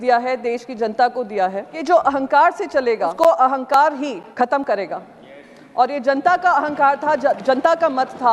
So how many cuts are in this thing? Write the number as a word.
three